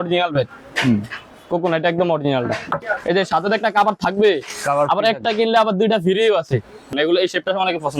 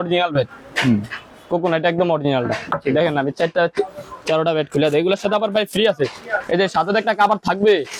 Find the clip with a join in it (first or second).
first